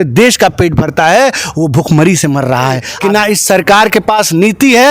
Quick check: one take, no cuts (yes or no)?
no